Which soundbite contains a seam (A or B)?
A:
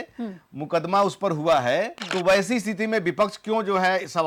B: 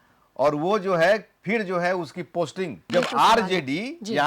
B